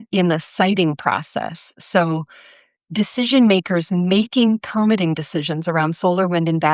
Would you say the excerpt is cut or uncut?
uncut